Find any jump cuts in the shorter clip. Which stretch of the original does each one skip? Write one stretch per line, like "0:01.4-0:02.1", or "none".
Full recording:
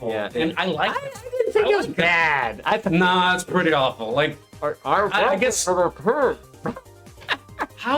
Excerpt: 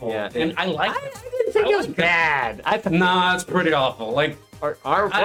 none

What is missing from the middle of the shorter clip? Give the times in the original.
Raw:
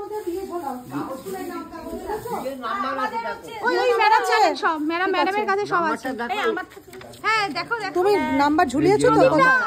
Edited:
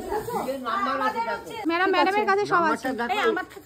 0:03.6-0:04.8

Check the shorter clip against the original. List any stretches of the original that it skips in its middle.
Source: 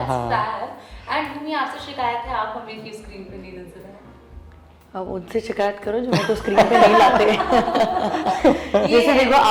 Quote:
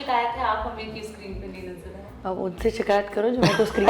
0:04.0-0:04.8

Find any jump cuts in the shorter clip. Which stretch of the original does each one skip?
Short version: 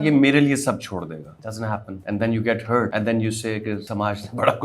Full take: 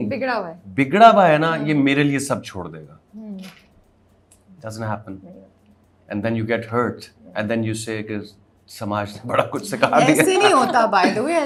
0:03.0-0:05.4
0:06.9-0:07.3
0:08.3-0:08.8

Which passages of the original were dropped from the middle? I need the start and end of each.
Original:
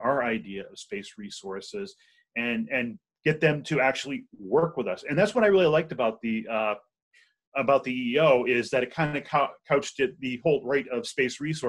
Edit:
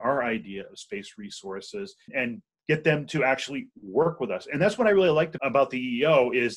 0:02.1-0:02.7
0:05.9-0:07.5

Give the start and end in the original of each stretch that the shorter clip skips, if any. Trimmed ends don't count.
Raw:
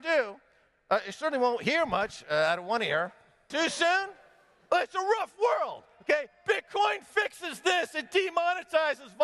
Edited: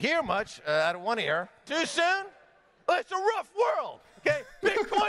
0:03.2-0:03.4

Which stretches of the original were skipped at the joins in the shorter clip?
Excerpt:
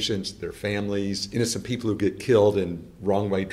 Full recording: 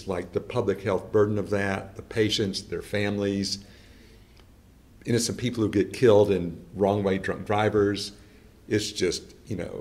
0:03.5-0:05.0

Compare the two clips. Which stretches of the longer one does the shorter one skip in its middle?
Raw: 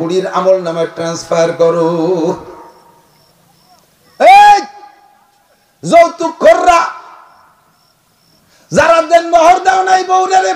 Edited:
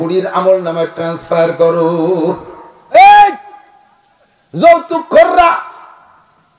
0:02.9-0:04.2

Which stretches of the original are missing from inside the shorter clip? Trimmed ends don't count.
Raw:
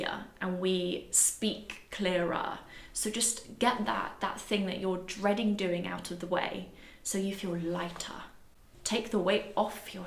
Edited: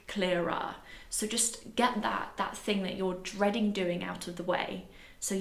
none

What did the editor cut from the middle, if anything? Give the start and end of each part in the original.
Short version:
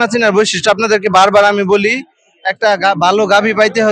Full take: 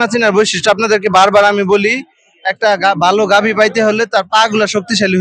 none

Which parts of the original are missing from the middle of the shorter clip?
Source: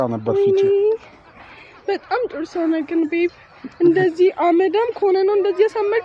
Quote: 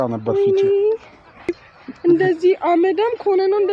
0:01.7-0:03.4

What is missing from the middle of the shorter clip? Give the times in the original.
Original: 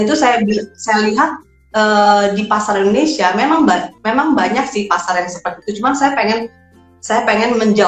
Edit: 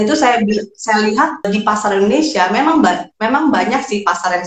0:01.5-0:02.3

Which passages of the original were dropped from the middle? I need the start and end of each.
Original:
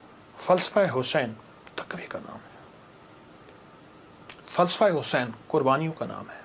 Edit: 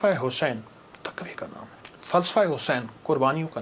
0:02.6-0:04.3

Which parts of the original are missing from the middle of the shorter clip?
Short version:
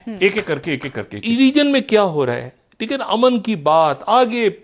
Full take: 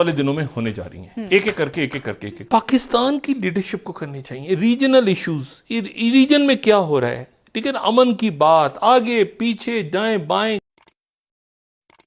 0:02.2-0:05.9

